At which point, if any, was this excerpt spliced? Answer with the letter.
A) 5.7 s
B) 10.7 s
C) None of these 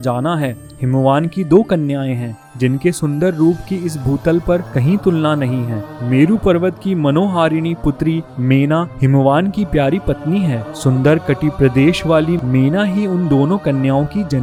C